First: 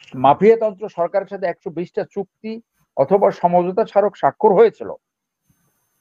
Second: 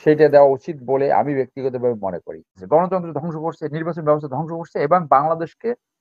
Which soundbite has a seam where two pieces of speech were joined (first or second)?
second